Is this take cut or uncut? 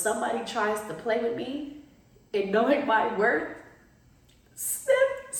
uncut